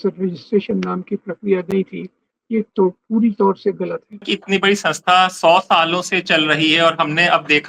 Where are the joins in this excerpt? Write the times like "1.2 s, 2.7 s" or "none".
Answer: 4.3 s